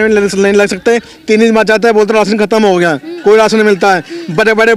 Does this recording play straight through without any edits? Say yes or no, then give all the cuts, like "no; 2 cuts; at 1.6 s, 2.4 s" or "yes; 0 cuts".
yes; 0 cuts